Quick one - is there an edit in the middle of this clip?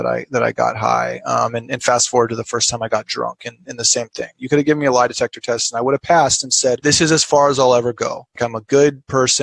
yes; 2 cuts; at 6.8 s, 8.4 s

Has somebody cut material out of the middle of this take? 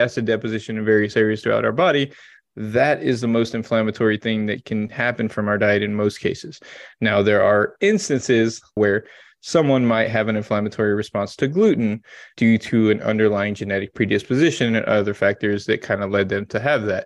yes; 2 cuts; at 8.8 s, 12.2 s

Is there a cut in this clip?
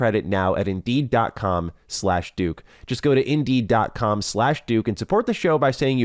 no; 0 cuts

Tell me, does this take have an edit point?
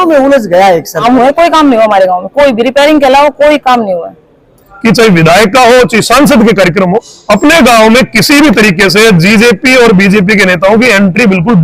yes; 2 cuts; at 1.0 s, 4.7 s

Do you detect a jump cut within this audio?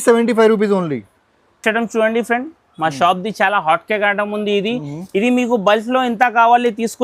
no; 0 cuts

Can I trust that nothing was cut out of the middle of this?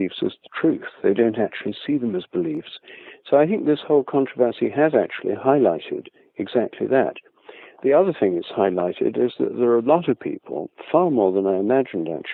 yes; 0 cuts

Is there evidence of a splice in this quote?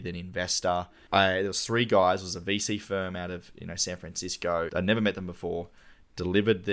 yes; 2 cuts; at 1.0 s, 4.7 s

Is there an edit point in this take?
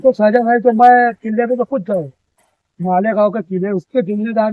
no; 0 cuts

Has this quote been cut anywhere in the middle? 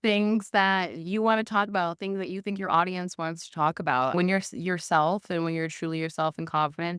yes; 1 cut; at 4.1 s

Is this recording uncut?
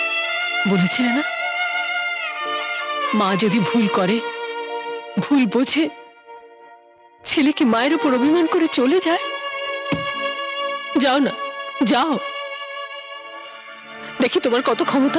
yes; 0 cuts

